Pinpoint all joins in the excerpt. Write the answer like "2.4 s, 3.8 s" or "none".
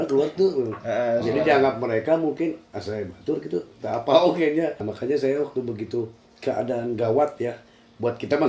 4.9 s